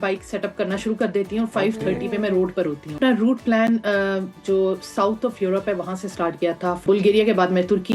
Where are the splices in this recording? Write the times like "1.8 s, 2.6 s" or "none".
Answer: 3.0 s, 6.8 s